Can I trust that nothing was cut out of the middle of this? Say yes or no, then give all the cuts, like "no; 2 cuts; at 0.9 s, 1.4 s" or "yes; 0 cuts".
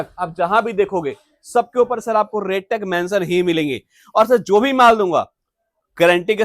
yes; 0 cuts